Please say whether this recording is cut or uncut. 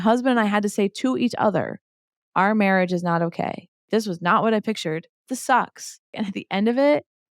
cut